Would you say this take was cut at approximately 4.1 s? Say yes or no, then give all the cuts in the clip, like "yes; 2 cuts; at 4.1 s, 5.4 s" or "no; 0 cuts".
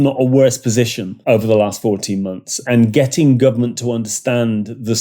no; 2 cuts; at 1.1 s, 2.7 s